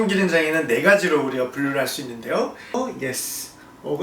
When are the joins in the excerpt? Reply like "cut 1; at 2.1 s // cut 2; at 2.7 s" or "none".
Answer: cut 1; at 2.7 s